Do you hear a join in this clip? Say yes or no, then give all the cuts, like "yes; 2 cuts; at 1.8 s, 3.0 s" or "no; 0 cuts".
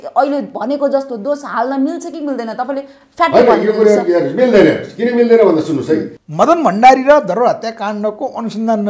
yes; 1 cut; at 6.2 s